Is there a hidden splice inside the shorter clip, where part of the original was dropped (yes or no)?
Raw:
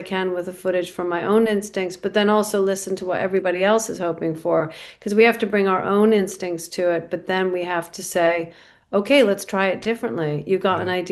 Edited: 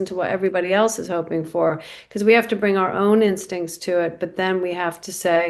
no